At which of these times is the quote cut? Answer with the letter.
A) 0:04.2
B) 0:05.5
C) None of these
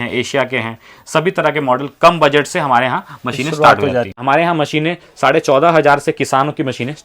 A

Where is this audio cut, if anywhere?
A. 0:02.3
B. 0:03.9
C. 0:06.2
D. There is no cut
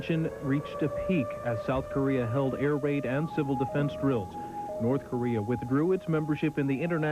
C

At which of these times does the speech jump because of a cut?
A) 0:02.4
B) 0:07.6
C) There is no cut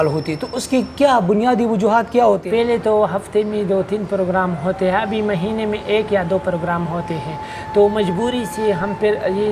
A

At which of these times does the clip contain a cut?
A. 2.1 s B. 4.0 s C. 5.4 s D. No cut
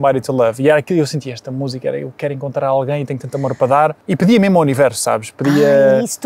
B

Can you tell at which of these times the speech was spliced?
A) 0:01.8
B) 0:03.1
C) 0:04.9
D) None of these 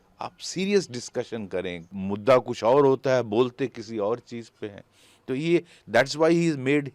A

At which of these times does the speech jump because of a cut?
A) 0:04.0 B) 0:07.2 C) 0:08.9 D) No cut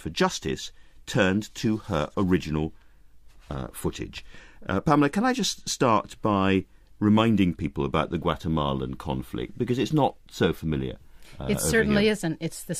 B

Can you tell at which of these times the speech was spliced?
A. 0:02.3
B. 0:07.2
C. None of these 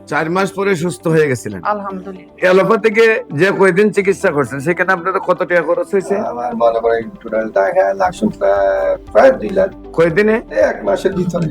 A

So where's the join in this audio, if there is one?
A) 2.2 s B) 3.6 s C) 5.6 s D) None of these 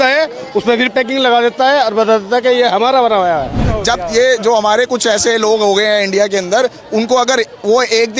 B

